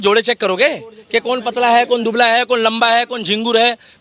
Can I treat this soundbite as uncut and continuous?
yes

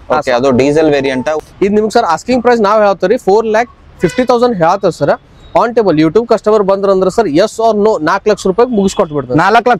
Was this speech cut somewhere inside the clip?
yes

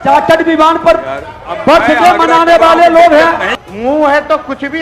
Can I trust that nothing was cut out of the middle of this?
no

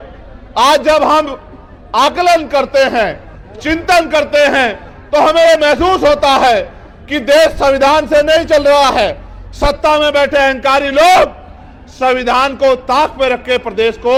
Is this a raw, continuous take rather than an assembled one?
yes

